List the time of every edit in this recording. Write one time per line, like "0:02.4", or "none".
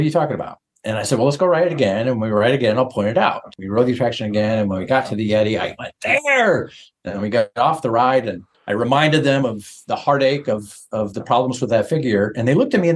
0:03.5
0:07.5